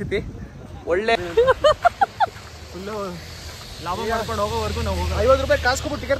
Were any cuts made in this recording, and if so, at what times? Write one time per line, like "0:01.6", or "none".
0:01.2

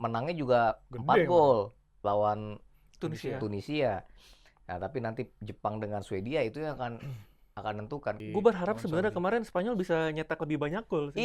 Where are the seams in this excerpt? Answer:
0:08.2

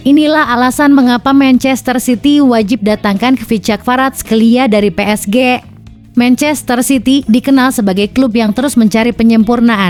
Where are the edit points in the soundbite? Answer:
none

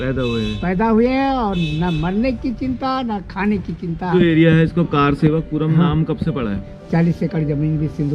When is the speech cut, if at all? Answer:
0:04.1
0:06.5

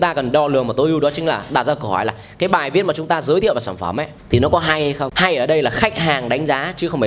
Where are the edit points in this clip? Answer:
0:04.1
0:05.1

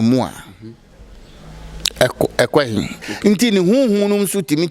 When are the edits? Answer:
0:03.1

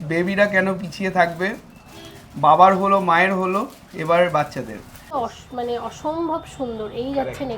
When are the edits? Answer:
0:05.1

